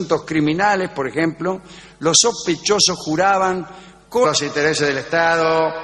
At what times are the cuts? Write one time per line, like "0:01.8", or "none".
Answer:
none